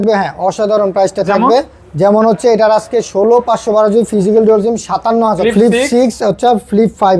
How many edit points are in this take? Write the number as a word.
one